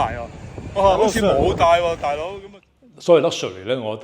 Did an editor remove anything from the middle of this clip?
yes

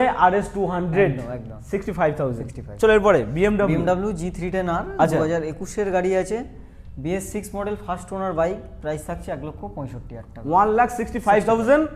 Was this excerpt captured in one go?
yes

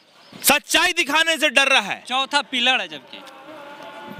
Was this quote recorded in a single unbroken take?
yes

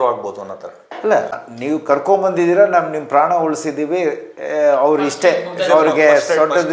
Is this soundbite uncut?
no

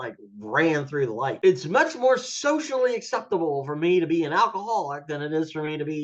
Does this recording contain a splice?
yes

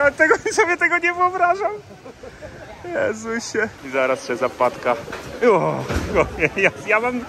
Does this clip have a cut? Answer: no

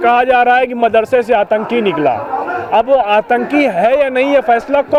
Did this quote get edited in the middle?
no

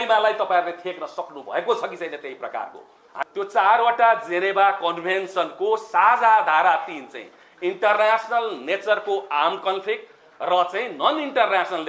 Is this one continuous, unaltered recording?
no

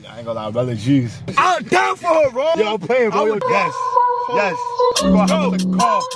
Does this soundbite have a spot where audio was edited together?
yes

